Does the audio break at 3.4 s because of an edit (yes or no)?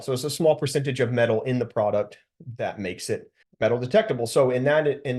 yes